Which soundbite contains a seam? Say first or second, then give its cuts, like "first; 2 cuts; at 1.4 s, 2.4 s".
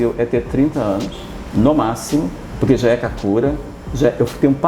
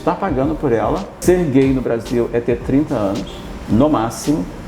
second; 1 cut; at 1.2 s